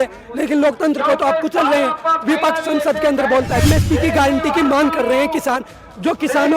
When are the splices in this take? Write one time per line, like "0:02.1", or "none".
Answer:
0:03.7